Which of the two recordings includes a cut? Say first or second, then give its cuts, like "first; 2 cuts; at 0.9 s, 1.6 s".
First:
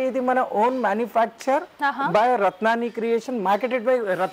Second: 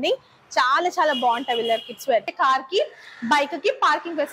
second; 1 cut; at 2.3 s